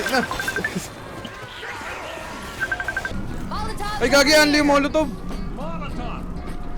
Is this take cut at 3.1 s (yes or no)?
yes